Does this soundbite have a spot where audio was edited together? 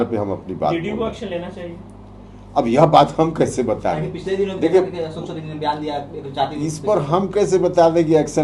no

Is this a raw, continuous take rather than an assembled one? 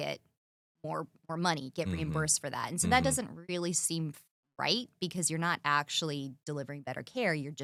yes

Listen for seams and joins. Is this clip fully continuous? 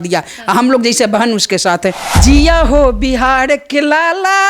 no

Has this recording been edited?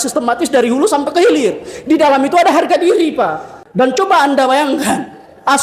yes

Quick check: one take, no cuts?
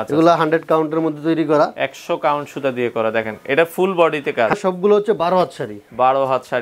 no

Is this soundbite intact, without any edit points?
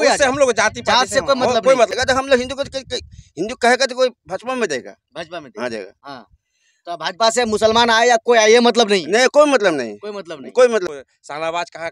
no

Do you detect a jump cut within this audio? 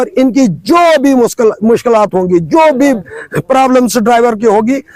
no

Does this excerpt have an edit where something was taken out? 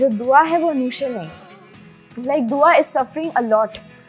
no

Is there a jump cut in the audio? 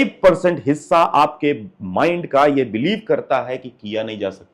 no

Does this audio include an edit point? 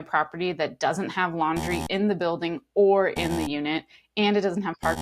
no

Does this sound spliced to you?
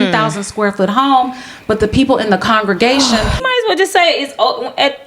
yes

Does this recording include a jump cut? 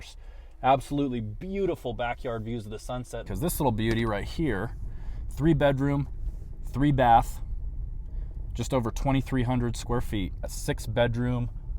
yes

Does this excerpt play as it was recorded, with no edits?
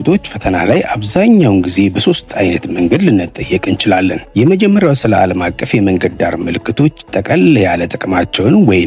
yes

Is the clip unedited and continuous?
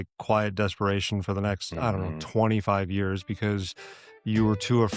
yes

